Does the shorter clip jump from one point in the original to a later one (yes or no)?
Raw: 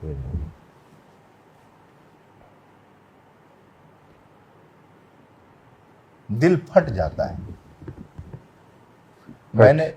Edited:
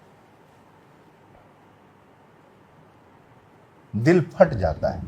yes